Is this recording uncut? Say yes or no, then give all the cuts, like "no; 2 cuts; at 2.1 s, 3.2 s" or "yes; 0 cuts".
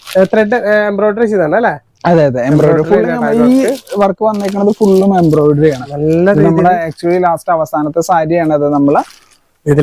yes; 0 cuts